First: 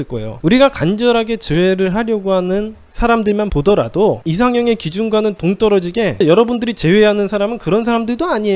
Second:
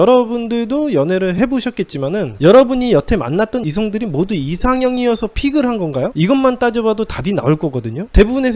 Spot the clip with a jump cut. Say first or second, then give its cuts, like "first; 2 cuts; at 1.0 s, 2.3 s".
first; 2 cuts; at 4.2 s, 6.2 s